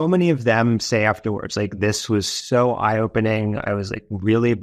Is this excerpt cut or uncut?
uncut